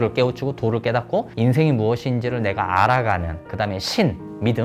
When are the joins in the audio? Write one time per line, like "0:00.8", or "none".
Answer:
none